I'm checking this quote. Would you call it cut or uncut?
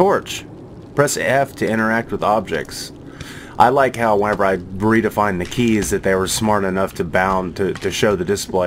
uncut